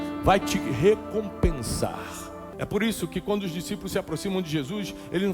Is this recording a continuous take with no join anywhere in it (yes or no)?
no